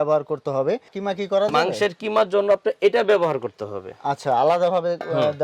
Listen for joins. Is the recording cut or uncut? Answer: cut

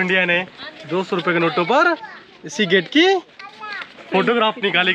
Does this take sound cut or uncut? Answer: uncut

